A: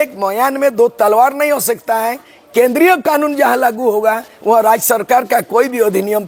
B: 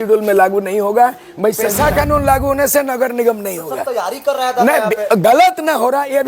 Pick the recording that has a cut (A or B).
B